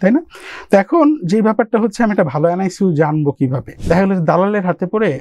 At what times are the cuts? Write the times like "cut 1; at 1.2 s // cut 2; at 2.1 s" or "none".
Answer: cut 1; at 3.7 s